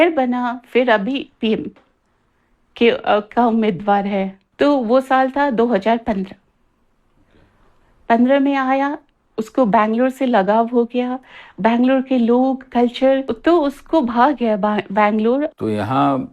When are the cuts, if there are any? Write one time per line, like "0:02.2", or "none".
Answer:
0:04.4
0:13.3
0:15.5